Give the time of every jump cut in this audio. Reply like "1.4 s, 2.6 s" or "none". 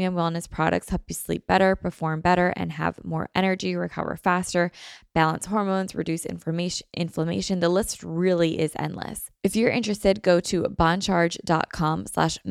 9.2 s